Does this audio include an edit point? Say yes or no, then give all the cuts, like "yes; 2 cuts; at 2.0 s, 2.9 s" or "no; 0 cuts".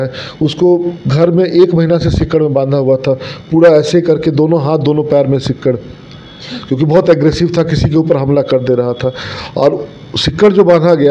no; 0 cuts